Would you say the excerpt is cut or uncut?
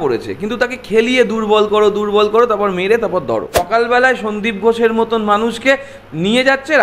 cut